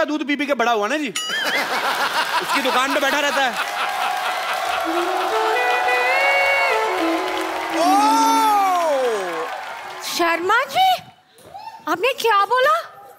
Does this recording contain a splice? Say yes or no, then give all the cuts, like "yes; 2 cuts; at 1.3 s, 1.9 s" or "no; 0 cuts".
no; 0 cuts